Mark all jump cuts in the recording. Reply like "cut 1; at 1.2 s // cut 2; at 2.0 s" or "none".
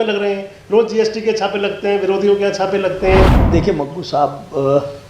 cut 1; at 3.4 s